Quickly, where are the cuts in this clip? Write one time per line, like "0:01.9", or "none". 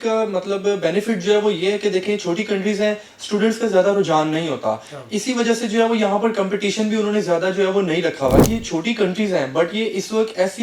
0:08.4